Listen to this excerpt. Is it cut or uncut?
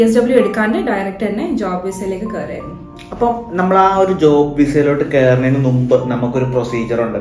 uncut